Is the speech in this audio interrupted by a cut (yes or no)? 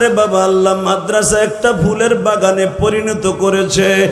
no